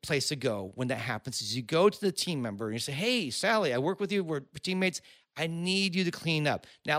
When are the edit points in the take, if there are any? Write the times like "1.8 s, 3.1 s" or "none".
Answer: none